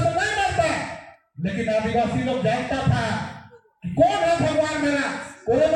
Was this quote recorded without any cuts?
yes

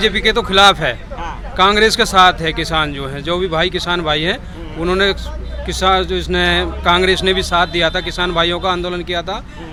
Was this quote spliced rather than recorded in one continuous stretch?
no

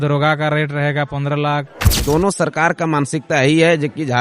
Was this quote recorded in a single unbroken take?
no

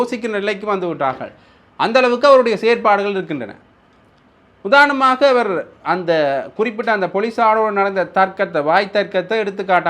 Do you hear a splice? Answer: no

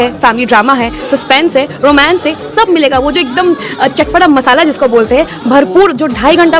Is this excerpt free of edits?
yes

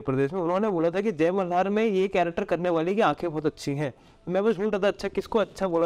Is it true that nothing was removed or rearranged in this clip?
yes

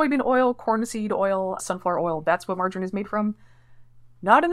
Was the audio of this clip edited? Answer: no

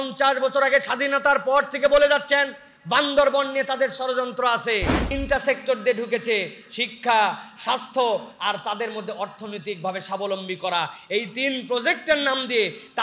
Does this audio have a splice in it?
yes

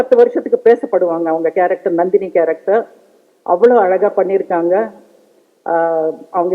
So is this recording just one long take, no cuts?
yes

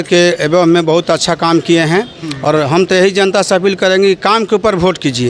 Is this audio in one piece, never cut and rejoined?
yes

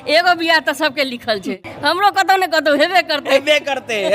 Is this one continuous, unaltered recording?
no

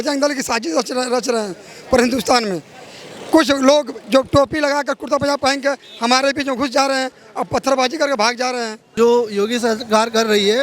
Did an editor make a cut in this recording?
yes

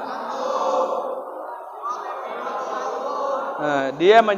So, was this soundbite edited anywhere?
no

